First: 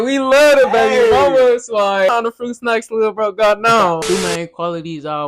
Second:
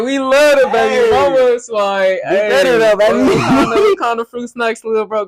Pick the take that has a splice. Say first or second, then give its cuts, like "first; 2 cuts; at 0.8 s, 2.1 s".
first; 2 cuts; at 2.1 s, 4.0 s